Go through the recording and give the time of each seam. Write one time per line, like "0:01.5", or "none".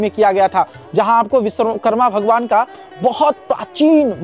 none